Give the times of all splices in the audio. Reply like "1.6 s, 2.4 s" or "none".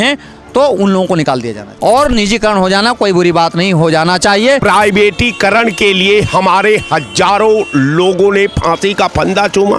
1.6 s, 4.6 s